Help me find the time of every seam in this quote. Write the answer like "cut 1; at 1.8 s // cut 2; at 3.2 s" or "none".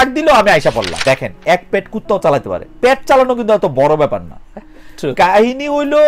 cut 1; at 1.0 s